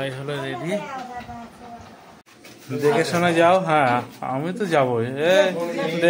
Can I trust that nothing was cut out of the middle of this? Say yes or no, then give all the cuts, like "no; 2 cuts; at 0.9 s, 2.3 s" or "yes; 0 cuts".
yes; 0 cuts